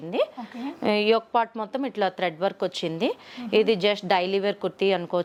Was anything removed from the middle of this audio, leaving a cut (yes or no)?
no